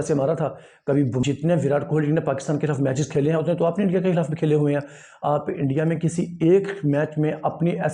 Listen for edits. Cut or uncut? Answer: cut